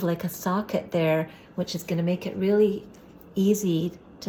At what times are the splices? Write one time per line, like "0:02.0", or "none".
none